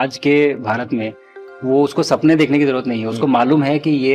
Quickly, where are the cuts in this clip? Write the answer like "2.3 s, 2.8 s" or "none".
none